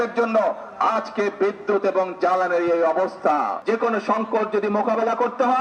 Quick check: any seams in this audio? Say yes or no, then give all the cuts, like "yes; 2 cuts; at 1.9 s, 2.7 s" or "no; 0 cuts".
no; 0 cuts